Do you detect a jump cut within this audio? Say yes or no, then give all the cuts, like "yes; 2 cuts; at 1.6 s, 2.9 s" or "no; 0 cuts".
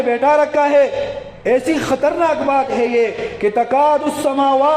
yes; 1 cut; at 1.3 s